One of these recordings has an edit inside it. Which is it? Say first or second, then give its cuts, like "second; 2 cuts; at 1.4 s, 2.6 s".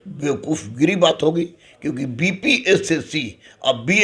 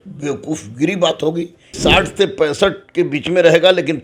second; 1 cut; at 1.6 s